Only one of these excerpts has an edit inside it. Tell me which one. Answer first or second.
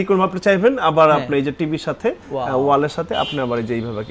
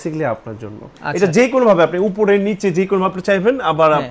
second